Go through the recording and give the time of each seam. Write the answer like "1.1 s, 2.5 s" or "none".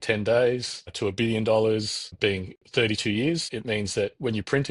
0.9 s, 2.1 s, 3.5 s